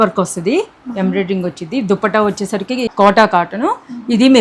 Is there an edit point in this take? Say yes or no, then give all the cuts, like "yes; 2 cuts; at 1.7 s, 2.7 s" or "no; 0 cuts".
yes; 1 cut; at 2.9 s